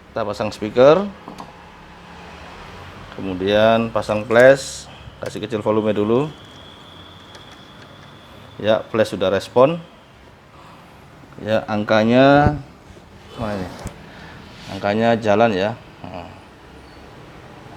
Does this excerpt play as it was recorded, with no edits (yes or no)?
yes